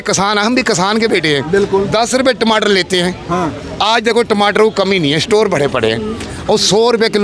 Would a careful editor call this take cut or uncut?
uncut